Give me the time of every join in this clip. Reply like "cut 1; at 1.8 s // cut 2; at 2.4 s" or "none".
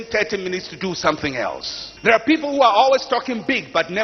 cut 1; at 1.9 s